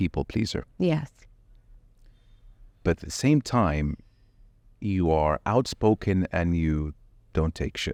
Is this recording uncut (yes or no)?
yes